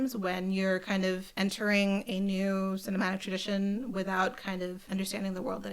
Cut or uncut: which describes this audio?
cut